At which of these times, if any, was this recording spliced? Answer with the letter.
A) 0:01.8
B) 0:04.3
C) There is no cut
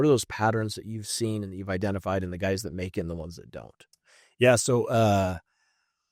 C